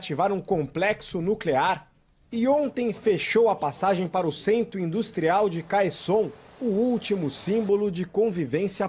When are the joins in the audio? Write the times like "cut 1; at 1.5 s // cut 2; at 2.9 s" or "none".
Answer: none